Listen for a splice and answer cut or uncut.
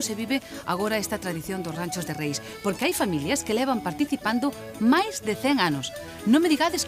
cut